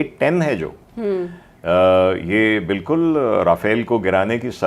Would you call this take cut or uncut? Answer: uncut